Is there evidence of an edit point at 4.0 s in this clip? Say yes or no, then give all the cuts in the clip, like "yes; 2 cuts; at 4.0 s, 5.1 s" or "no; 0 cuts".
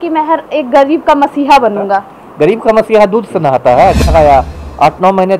yes; 1 cut; at 4.0 s